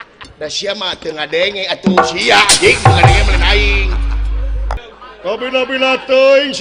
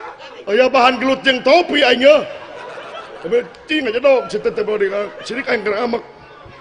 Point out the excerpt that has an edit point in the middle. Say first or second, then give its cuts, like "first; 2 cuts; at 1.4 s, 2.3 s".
first; 1 cut; at 4.8 s